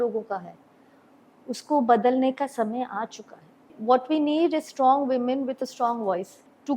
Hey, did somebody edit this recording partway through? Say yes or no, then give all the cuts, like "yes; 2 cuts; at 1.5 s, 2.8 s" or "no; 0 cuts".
yes; 1 cut; at 3.8 s